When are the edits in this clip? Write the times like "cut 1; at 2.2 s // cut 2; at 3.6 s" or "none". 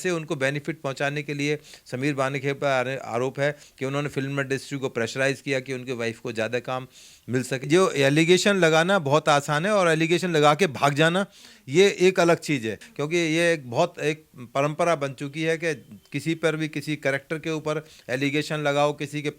cut 1; at 7.7 s // cut 2; at 12.8 s